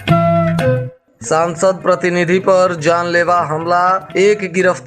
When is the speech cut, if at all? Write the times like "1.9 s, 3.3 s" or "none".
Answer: 0.9 s